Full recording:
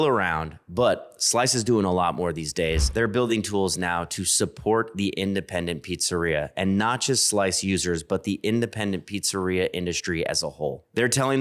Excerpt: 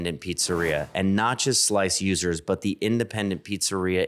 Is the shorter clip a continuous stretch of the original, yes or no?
yes